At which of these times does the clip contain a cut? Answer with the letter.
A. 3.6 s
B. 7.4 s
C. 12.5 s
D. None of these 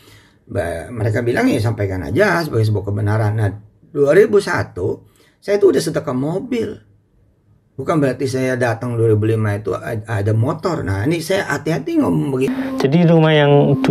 C